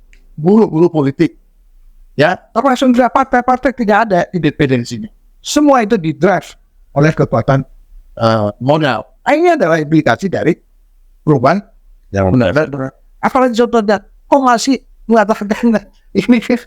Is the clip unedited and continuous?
yes; 0 cuts

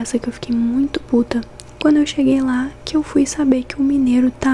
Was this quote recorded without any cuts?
no; 1 cut; at 1.6 s

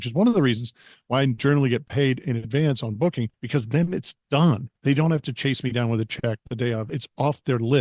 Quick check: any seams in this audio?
yes; 3 cuts; at 3.3 s, 4.7 s, 6.9 s

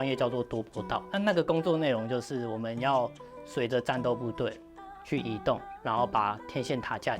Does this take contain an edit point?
yes; 1 cut; at 1.1 s

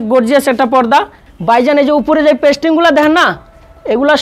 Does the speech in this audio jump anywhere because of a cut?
yes; 1 cut; at 1.2 s

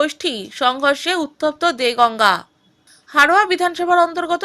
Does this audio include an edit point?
no; 0 cuts

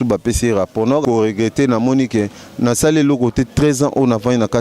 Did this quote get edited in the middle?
yes; 1 cut; at 1.0 s

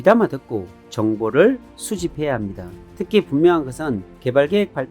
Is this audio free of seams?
no; 1 cut; at 2.8 s

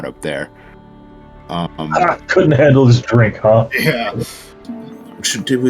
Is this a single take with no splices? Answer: no; 1 cut; at 4.5 s

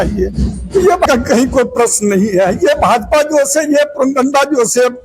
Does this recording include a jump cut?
yes; 1 cut; at 1.1 s

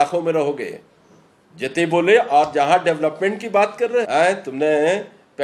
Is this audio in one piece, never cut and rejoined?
no; 1 cut; at 4.1 s

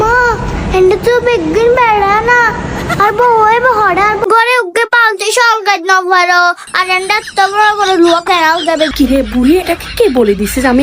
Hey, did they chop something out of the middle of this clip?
yes; 2 cuts; at 4.2 s, 8.9 s

